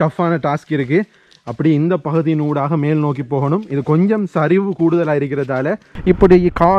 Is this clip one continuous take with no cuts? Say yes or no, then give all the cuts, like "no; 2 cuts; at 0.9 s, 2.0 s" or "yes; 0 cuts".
no; 1 cut; at 5.9 s